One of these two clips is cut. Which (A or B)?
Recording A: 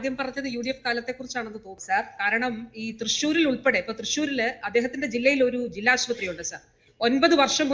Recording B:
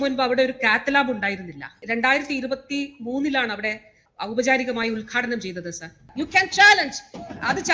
B